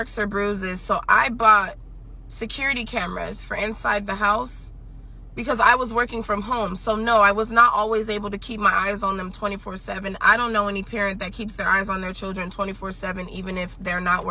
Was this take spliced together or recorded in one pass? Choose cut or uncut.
uncut